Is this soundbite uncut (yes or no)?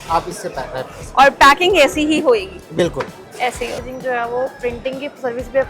no